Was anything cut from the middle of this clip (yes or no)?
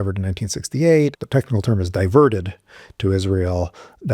yes